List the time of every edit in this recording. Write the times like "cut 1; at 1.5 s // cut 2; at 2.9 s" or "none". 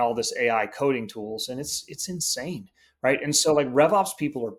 none